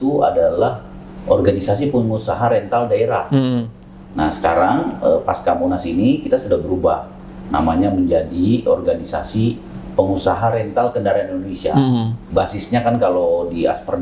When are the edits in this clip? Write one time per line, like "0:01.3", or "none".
0:12.2